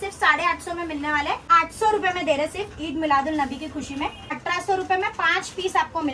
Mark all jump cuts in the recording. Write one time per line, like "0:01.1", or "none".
0:01.4
0:04.3